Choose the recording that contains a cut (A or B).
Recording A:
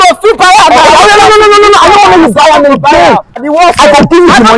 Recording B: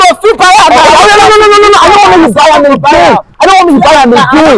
A